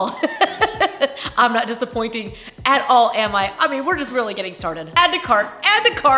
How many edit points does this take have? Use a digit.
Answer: 1